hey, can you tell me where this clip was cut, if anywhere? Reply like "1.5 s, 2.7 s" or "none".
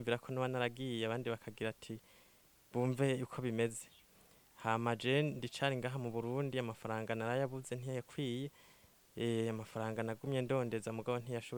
none